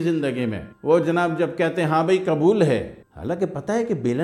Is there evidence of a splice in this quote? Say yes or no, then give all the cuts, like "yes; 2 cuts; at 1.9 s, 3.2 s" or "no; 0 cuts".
no; 0 cuts